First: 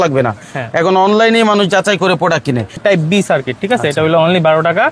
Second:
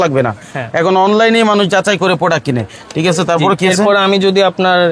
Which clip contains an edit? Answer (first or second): first